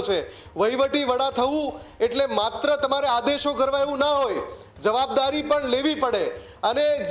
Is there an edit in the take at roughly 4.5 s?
no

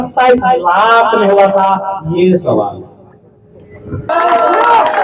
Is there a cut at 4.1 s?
yes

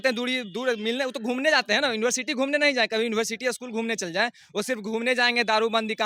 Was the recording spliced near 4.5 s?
no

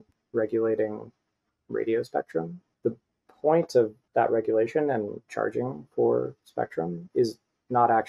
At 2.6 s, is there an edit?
yes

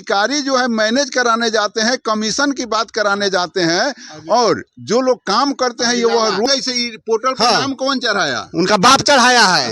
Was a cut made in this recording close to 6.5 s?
yes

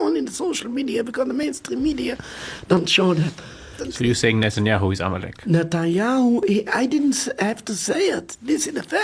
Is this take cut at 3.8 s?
yes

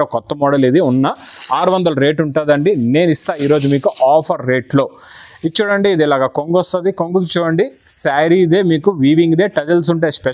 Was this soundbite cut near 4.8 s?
no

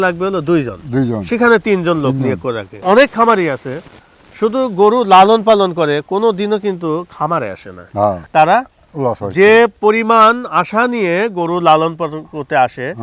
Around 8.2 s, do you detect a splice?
yes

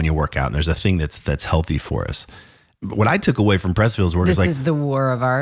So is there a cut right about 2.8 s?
yes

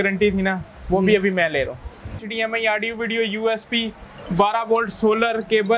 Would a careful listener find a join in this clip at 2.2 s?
yes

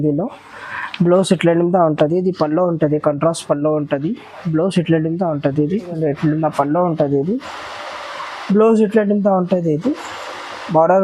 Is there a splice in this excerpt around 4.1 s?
no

